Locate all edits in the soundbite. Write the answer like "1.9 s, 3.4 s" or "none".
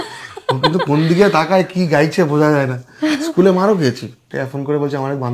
4.4 s

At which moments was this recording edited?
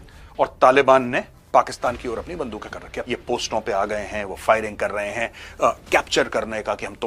3.0 s

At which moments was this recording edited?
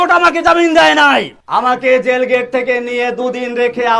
1.4 s

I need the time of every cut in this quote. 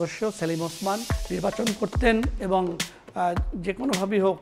1.1 s

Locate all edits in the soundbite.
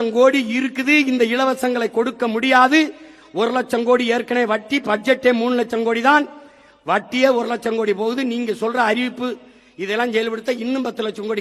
none

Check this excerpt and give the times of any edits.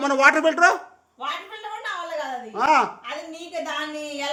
none

